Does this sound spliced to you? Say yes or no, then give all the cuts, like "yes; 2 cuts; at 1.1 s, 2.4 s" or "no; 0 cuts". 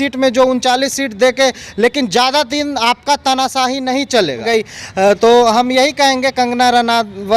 yes; 1 cut; at 4.4 s